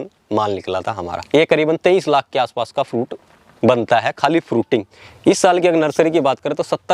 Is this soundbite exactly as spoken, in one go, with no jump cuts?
no; 2 cuts; at 1.2 s, 5.0 s

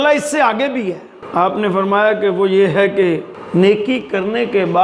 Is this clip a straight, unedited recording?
no; 2 cuts; at 1.1 s, 3.3 s

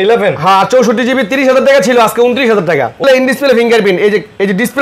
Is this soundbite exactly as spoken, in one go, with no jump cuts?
no; 1 cut; at 3.0 s

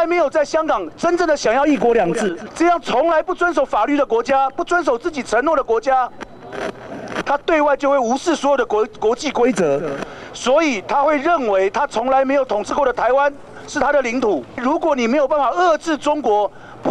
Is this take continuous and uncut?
no; 2 cuts; at 2.4 s, 14.6 s

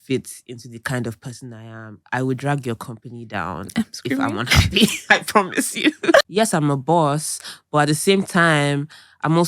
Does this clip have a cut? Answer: yes; 1 cut; at 6.3 s

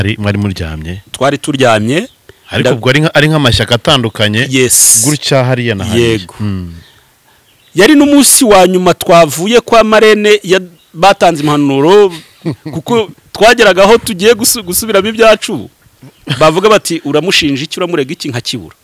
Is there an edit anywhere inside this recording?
no; 0 cuts

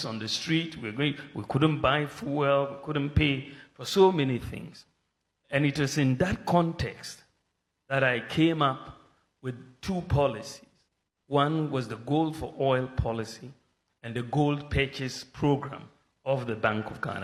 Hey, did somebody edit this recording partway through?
no; 0 cuts

